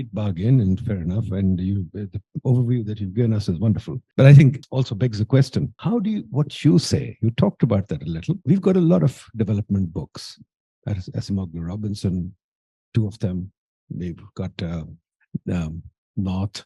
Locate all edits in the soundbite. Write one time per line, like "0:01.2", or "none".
0:04.0
0:04.6
0:05.7
0:08.4